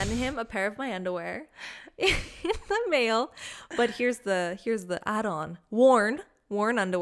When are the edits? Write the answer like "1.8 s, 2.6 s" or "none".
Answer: none